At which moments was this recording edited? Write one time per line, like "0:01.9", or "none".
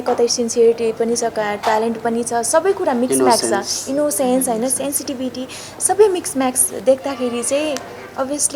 none

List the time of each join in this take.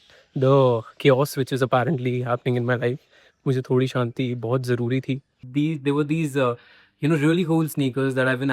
0:05.4

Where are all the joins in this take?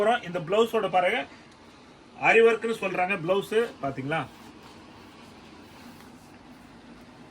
none

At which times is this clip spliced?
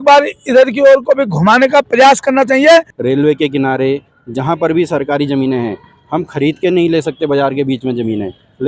0:02.9

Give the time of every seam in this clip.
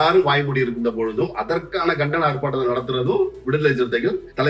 none

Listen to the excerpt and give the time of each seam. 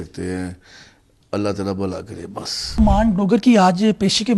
0:02.8

